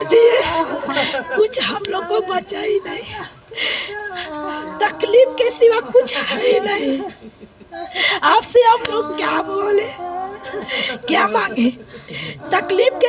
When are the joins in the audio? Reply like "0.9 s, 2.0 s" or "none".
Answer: none